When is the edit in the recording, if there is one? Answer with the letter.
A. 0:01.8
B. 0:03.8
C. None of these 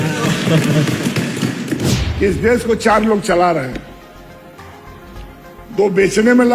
A